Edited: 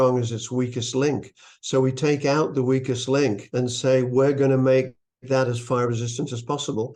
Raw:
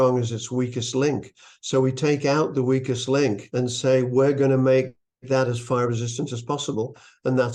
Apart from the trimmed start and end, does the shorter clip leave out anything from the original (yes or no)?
no